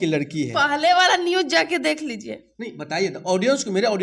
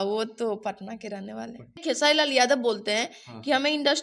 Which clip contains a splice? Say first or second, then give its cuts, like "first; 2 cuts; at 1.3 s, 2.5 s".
second; 1 cut; at 1.8 s